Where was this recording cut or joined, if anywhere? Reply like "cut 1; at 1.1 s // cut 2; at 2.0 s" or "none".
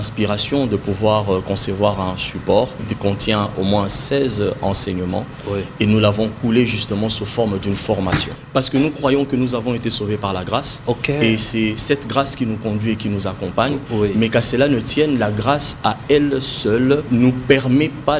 cut 1; at 2.9 s // cut 2; at 8.4 s // cut 3; at 17.1 s